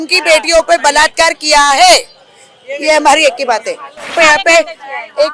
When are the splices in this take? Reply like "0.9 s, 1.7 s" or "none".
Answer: 4.1 s